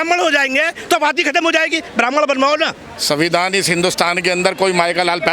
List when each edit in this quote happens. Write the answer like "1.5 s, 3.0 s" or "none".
2.9 s